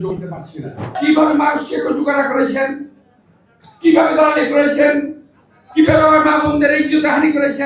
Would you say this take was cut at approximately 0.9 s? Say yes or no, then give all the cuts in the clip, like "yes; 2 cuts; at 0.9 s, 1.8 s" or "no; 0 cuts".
yes; 1 cut; at 0.9 s